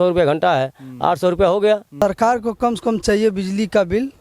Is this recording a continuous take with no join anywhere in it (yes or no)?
no